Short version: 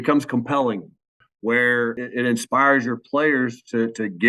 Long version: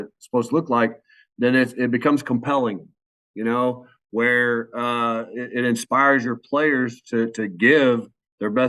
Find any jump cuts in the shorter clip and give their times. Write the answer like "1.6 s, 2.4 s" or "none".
1.2 s, 2.0 s